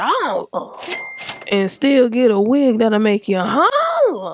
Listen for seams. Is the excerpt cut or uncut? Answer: cut